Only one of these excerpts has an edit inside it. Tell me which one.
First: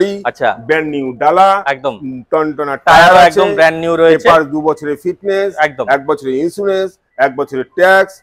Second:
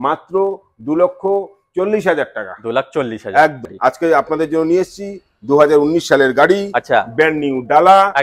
second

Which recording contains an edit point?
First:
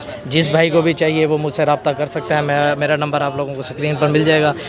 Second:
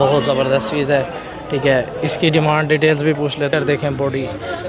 second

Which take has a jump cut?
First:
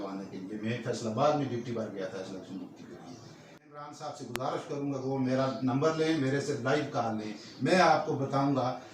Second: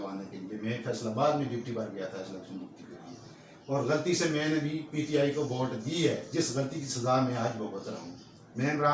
first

